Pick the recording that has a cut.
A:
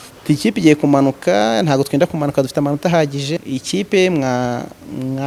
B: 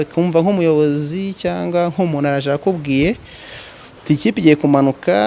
A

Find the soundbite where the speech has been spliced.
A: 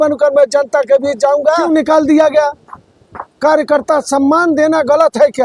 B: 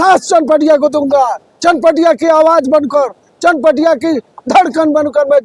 A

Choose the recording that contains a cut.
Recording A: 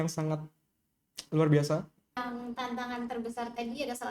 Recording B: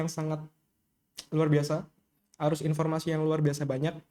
A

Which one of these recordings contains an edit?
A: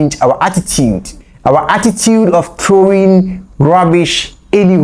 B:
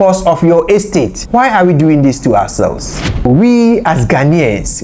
B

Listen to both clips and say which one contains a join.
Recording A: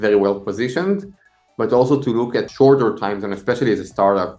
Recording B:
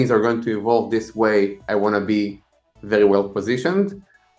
A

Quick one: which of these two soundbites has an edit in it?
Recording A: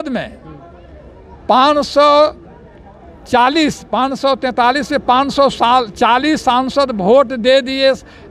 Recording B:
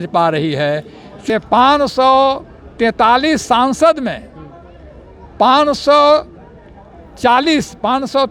B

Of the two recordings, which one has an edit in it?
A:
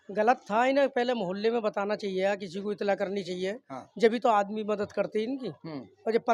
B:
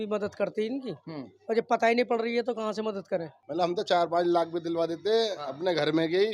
B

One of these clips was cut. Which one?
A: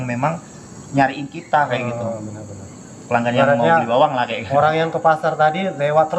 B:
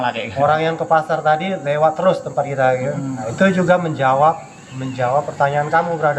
B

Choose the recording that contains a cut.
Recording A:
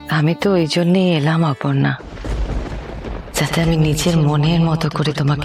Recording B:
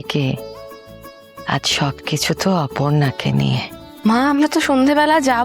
B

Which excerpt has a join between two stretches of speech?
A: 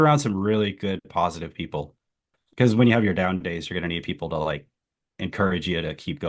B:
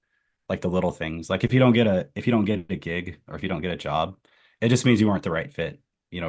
A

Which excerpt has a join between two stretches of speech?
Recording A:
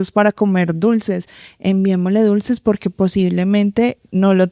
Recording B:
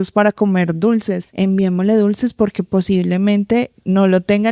B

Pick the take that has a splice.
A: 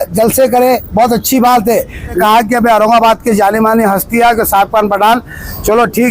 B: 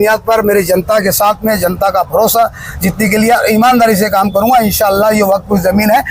A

